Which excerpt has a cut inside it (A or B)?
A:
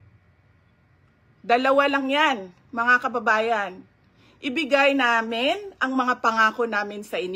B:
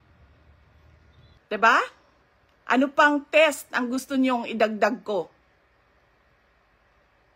B